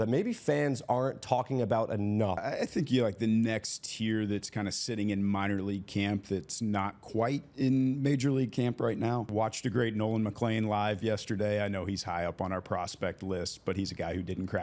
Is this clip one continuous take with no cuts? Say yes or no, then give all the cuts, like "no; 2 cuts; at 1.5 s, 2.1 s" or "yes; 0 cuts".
no; 2 cuts; at 2.4 s, 9.3 s